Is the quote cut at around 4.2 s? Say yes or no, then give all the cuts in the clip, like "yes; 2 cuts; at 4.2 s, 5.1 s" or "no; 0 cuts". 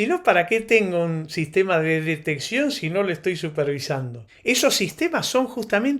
yes; 1 cut; at 4.2 s